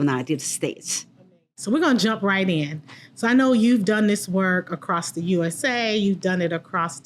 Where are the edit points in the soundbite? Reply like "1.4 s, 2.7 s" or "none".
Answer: 1.1 s

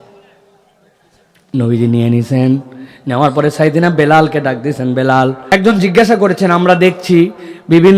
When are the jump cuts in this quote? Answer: 5.4 s

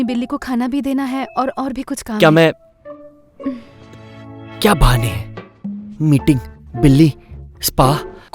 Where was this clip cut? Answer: 3.7 s

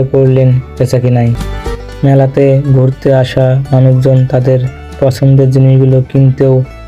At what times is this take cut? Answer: 1.5 s

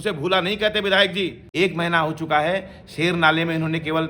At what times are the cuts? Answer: 1.4 s

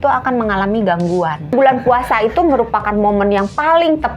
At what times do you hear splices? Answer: 1.5 s

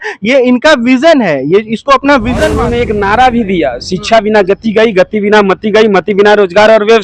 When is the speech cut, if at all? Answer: 2.7 s

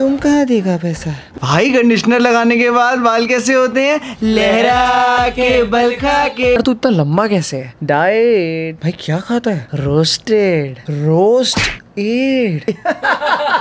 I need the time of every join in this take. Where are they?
1.3 s, 6.6 s, 12.7 s

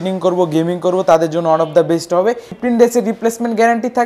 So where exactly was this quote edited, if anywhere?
2.5 s

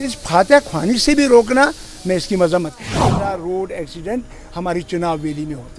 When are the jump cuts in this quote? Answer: 3.2 s

